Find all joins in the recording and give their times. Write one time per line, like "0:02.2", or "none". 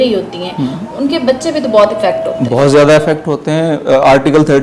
none

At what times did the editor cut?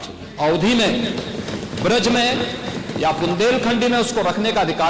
none

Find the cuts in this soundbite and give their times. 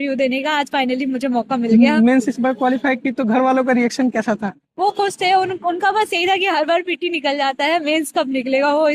none

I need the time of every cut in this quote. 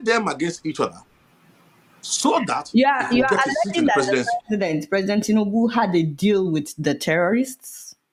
none

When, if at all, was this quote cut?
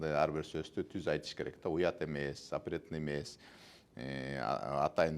0:01.6

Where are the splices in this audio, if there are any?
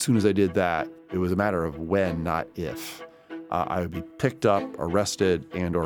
0:00.9

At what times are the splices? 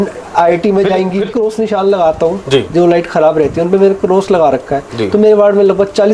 0:01.3

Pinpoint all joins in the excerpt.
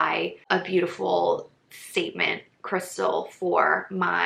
none

